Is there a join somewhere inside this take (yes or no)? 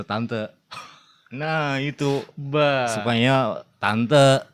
no